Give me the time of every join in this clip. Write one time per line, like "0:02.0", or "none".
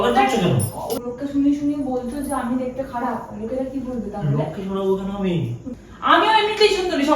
0:00.9
0:05.6